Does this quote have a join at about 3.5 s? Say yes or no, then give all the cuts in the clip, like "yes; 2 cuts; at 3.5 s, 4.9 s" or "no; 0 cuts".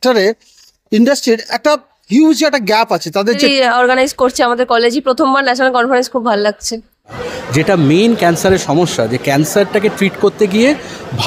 yes; 2 cuts; at 3.5 s, 7.2 s